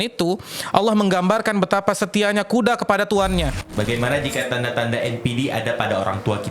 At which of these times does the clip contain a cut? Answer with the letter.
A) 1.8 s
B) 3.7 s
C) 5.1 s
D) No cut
B